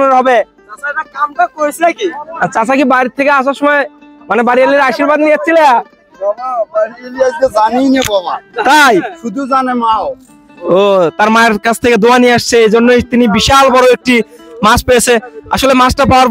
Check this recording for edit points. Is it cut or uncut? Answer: uncut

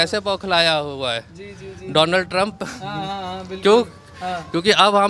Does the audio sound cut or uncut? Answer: uncut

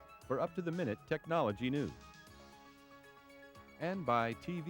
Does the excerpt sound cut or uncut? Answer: cut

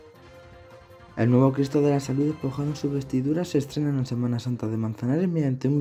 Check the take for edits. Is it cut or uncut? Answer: cut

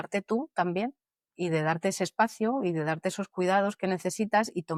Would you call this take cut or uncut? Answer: uncut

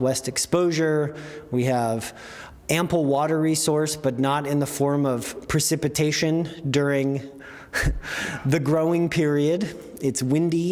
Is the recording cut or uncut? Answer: uncut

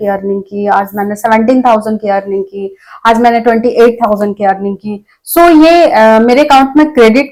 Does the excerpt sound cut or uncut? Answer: uncut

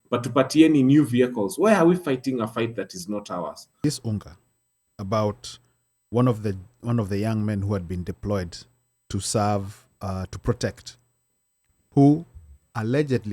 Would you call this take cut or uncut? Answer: cut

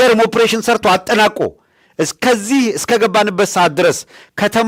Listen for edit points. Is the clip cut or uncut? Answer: uncut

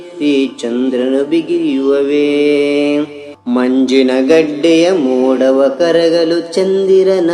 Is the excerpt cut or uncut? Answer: cut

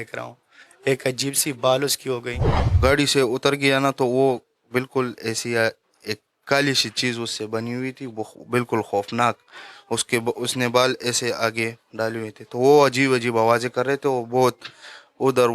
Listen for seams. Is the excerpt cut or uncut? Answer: cut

